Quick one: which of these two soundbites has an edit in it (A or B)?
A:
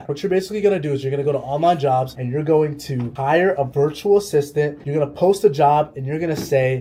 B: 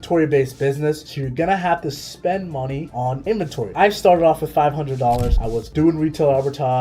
B